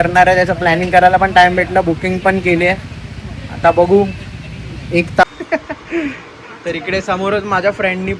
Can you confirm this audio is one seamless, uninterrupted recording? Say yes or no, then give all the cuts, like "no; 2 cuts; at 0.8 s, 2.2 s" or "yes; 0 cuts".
no; 1 cut; at 5.2 s